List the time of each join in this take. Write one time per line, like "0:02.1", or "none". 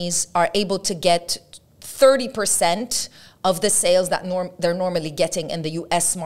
none